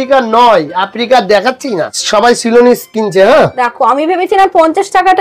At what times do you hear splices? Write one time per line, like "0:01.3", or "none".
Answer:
0:02.0